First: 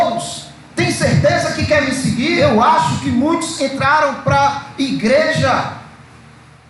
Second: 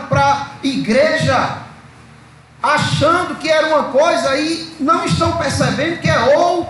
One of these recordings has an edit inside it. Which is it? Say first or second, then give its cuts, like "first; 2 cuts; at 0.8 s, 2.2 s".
first; 1 cut; at 2.4 s